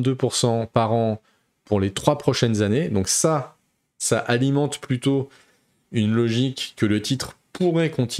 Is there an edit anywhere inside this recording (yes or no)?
no